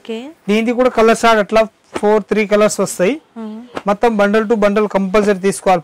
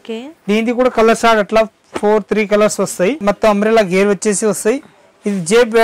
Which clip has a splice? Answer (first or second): second